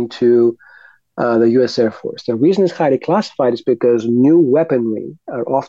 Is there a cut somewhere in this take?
no; 0 cuts

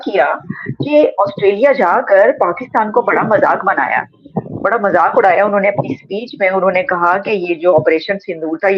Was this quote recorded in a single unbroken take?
yes; 0 cuts

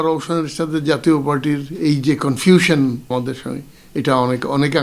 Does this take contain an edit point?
yes; 1 cut; at 3.1 s

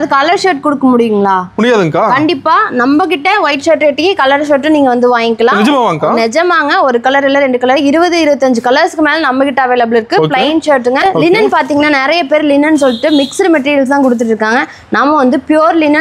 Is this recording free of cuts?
no; 1 cut; at 11.0 s

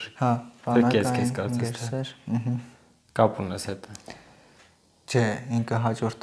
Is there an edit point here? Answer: no; 0 cuts

